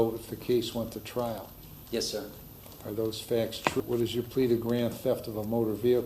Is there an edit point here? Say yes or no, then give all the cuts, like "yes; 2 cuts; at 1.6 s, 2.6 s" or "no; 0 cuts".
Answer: yes; 1 cut; at 3.8 s